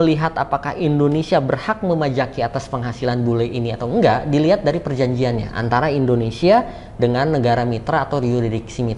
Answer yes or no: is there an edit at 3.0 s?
no